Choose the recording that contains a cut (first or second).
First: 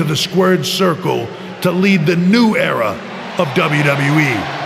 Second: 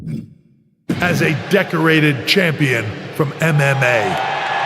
second